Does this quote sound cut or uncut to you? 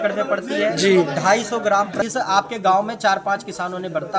cut